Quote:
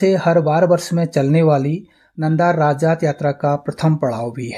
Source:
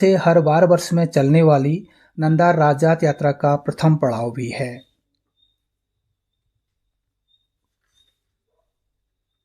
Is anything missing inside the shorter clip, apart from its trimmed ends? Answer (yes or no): no